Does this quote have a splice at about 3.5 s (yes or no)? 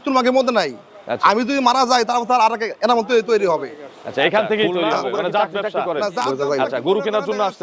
no